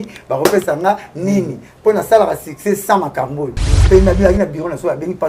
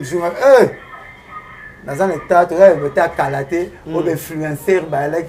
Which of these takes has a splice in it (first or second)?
first